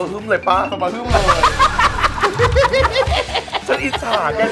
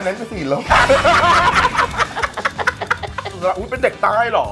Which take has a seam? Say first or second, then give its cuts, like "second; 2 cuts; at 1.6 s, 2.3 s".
second; 1 cut; at 3.3 s